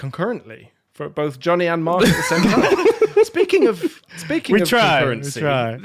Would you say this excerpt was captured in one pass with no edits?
yes; 0 cuts

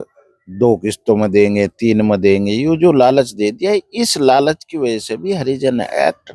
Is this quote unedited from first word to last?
yes; 0 cuts

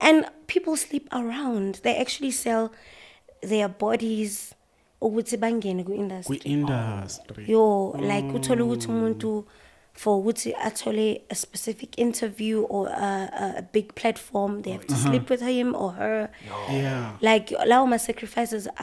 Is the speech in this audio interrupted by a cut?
no; 0 cuts

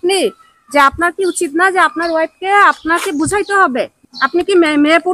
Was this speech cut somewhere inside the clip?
yes; 1 cut; at 4.0 s

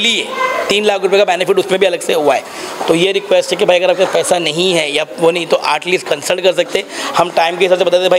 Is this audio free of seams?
yes; 0 cuts

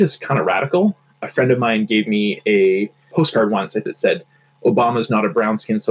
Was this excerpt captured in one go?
no; 3 cuts; at 1.1 s, 3.0 s, 3.8 s

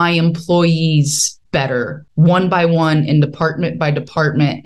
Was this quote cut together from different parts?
yes; 1 cut; at 1.6 s

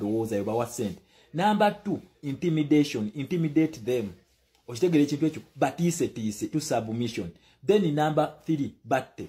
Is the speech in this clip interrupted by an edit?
yes; 1 cut; at 6.5 s

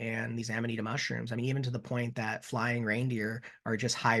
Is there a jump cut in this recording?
no; 0 cuts

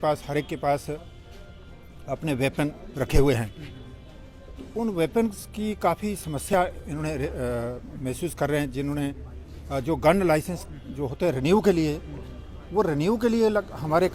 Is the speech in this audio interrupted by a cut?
no; 0 cuts

